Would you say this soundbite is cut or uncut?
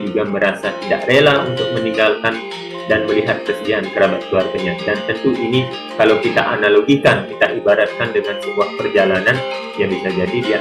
uncut